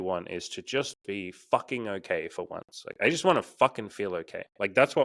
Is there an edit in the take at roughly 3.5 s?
no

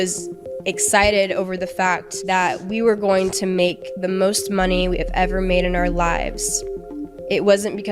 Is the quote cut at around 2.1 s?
yes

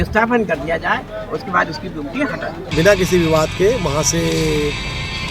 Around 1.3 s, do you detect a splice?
no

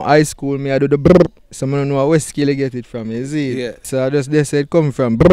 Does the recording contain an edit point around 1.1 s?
no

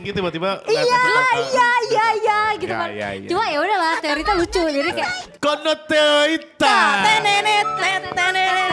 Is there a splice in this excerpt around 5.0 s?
no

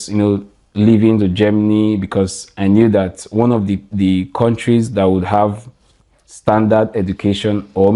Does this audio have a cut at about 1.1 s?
no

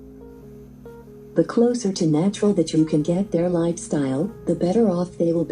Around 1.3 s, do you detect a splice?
yes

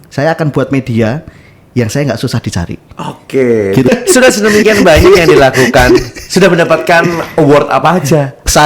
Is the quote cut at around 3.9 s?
yes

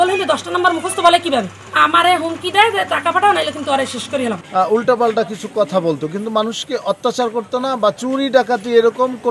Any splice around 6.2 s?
no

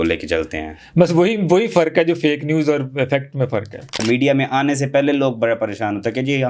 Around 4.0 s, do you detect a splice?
yes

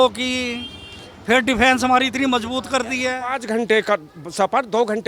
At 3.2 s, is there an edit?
yes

